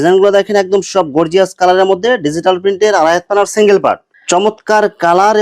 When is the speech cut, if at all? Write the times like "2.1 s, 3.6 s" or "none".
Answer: 4.1 s